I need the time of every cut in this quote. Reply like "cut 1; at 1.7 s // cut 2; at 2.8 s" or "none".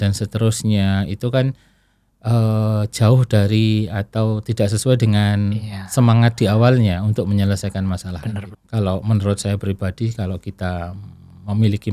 cut 1; at 8.5 s